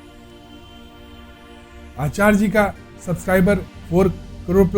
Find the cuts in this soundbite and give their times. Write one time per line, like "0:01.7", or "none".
0:03.7